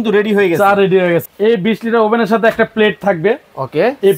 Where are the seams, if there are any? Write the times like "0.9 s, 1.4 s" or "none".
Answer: 1.2 s